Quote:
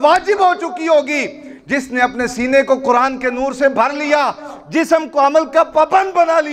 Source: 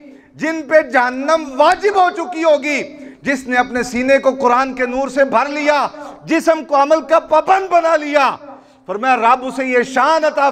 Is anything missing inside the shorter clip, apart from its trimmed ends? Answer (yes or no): no